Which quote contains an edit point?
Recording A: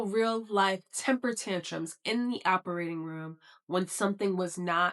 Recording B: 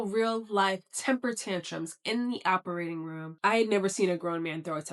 B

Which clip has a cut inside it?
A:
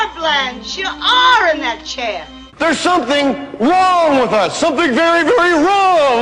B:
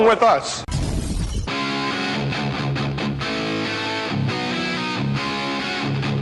A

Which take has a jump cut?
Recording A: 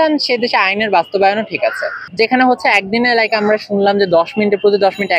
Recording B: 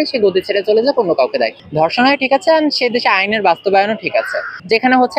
B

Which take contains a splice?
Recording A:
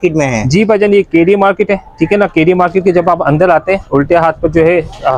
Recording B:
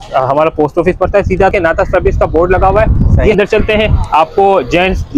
B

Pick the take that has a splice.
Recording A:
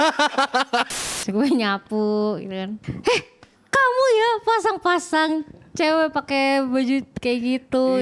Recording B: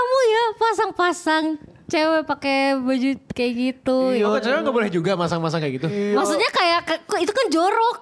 A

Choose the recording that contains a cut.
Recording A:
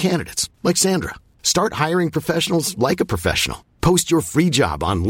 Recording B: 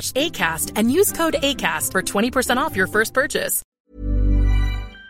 B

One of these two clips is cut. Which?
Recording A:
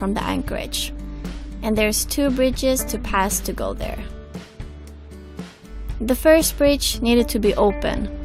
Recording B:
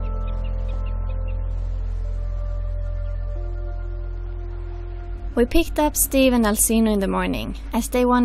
B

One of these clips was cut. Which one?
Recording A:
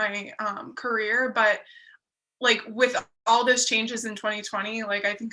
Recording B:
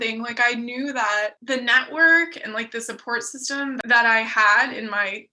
B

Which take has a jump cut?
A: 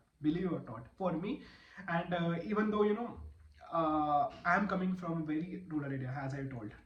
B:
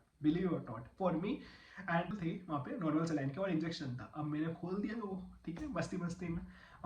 B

